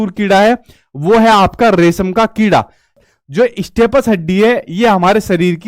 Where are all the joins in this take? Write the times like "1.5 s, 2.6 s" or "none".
2.9 s